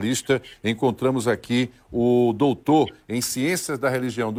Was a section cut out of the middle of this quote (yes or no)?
no